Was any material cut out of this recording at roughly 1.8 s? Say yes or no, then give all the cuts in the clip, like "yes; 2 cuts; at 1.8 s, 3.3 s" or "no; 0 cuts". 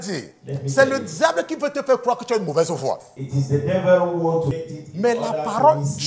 no; 1 cut; at 4.6 s